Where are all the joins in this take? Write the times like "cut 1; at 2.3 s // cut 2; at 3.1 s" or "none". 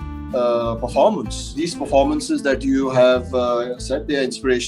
cut 1; at 1.5 s